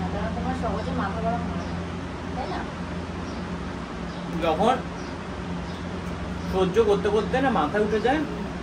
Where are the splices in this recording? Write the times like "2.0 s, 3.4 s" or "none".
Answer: none